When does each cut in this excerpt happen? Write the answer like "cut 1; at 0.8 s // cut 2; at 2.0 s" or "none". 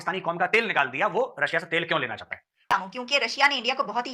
cut 1; at 2.7 s